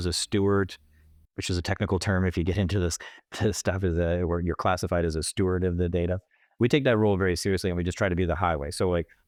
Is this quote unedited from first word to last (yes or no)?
yes